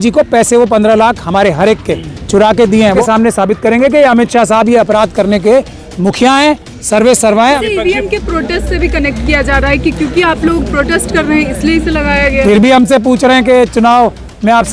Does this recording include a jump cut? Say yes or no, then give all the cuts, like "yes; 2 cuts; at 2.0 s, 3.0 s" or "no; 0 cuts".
yes; 2 cuts; at 3.0 s, 7.6 s